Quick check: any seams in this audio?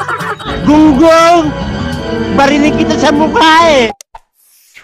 yes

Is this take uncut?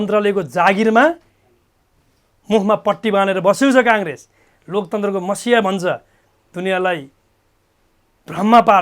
yes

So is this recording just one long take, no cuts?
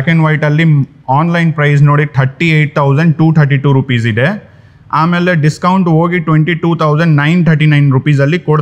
yes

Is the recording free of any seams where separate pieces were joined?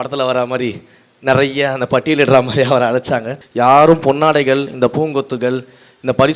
no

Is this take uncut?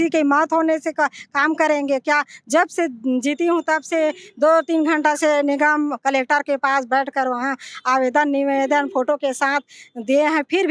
yes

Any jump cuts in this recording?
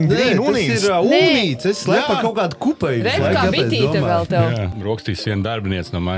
yes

